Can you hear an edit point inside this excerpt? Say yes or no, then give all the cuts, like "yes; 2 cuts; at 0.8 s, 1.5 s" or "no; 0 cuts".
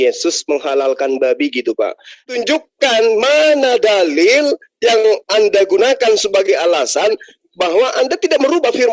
yes; 1 cut; at 2.1 s